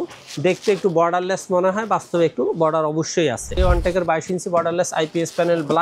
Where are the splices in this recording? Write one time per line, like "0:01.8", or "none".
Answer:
0:03.6